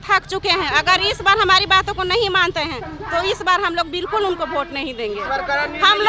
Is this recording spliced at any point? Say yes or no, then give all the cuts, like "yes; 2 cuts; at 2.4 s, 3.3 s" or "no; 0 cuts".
no; 0 cuts